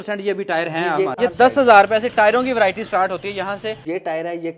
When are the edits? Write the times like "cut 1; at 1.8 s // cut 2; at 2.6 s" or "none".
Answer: cut 1; at 1.2 s // cut 2; at 3.8 s